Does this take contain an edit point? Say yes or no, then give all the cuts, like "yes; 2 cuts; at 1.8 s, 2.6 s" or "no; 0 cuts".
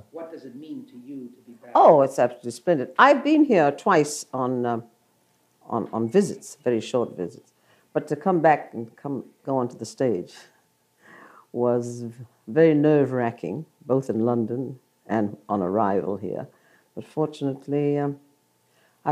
yes; 1 cut; at 14.4 s